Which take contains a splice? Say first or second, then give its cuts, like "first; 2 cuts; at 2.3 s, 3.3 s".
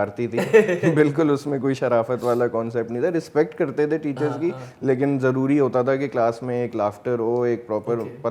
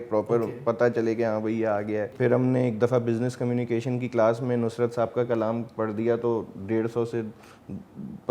second; 1 cut; at 2.1 s